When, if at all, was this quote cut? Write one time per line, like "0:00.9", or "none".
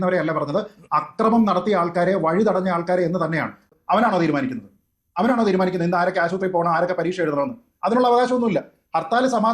0:03.6